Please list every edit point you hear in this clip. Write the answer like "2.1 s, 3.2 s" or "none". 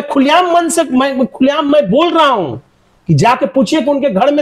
none